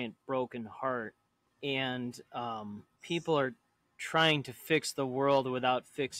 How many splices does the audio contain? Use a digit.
1